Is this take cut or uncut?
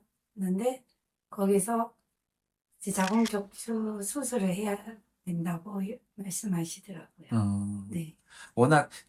uncut